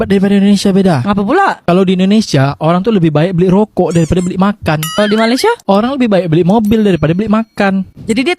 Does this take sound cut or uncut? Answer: uncut